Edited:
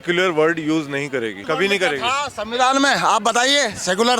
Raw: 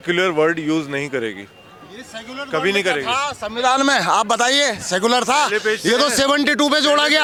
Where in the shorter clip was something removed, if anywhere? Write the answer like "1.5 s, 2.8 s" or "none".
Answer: 1.4 s